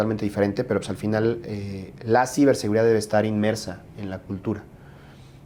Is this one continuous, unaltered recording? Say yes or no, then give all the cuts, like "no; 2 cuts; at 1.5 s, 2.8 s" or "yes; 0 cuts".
yes; 0 cuts